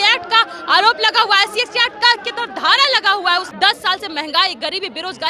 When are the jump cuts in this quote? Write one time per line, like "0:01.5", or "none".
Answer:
0:03.5

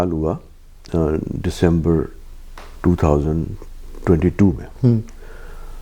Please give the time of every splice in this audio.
none

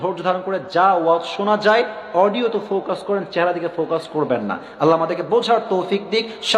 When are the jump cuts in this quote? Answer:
none

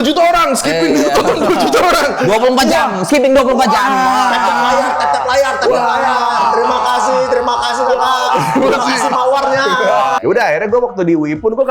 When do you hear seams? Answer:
0:10.2

